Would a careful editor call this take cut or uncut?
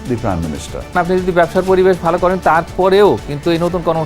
cut